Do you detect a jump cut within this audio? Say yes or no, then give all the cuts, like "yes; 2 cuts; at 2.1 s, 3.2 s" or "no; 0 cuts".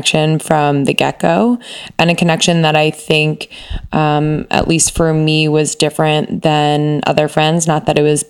no; 0 cuts